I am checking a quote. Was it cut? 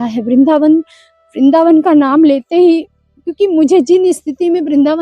no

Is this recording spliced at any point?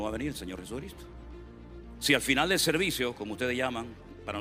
no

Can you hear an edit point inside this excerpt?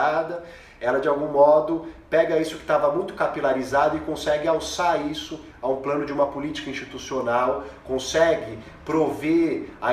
no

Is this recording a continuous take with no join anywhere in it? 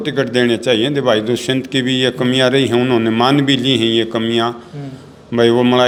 yes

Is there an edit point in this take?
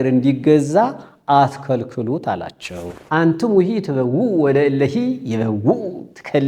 yes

